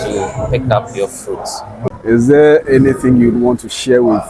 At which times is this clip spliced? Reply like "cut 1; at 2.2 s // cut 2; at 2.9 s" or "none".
none